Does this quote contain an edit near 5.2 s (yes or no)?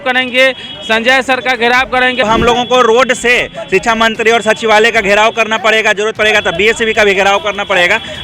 no